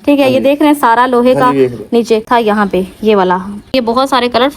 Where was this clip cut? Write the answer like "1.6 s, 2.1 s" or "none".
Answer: 2.3 s, 3.6 s